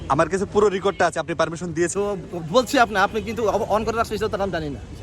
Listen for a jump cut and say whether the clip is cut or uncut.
cut